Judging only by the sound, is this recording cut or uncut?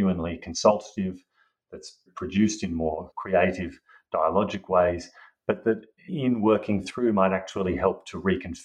cut